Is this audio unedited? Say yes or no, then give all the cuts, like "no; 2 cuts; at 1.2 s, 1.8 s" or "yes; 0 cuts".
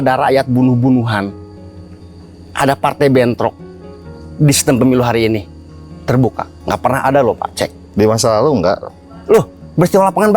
yes; 0 cuts